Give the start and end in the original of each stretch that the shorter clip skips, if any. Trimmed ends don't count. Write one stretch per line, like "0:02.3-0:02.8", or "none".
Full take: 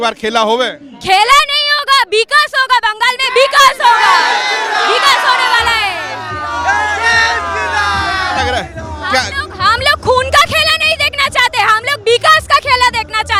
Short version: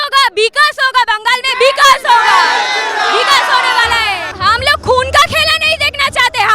0:06.0-0:09.5